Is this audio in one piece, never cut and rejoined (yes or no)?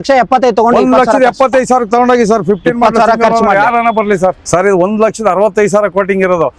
no